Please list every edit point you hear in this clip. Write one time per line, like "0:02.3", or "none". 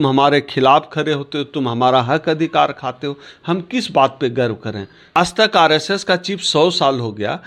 0:05.2